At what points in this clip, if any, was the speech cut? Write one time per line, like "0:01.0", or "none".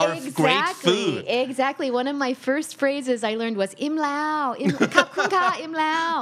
none